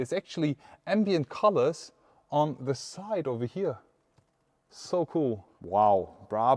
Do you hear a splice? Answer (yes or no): yes